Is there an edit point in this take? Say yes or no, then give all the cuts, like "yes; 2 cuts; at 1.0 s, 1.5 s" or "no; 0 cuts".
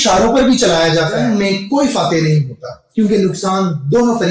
yes; 1 cut; at 1.1 s